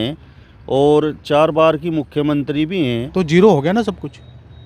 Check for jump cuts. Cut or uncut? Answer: cut